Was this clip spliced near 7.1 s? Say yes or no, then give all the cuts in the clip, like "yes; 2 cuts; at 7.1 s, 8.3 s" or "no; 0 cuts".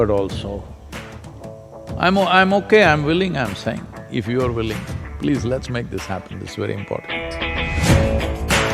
yes; 1 cut; at 7.1 s